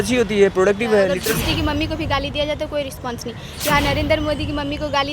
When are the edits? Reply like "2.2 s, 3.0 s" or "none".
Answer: 1.1 s